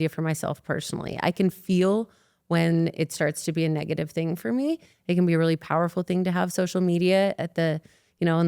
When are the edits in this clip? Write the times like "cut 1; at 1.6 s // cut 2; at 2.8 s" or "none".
cut 1; at 4.9 s